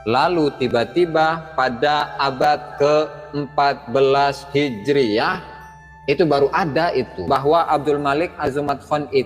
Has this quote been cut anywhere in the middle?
yes; 1 cut; at 7.2 s

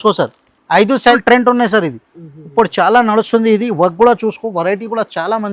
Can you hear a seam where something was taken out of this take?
yes; 1 cut; at 1.1 s

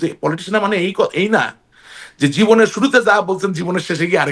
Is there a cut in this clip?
no; 0 cuts

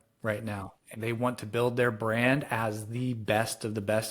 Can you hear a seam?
yes; 1 cut; at 0.9 s

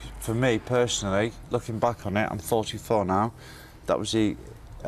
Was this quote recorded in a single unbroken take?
yes; 0 cuts

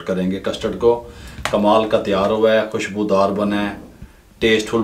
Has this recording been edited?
no; 0 cuts

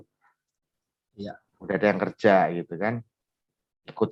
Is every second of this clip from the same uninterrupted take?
yes; 0 cuts

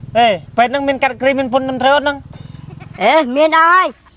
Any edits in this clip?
no; 0 cuts

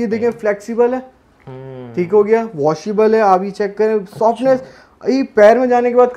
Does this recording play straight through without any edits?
yes; 0 cuts

